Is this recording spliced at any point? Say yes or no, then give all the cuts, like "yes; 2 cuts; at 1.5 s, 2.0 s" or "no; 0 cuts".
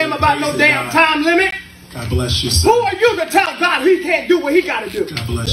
no; 0 cuts